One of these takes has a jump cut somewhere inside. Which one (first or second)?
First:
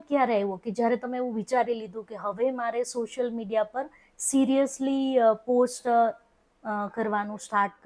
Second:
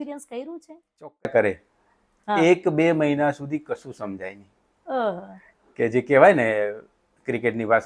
second